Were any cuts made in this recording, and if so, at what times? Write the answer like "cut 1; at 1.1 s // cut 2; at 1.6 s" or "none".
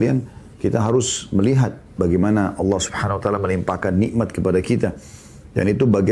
none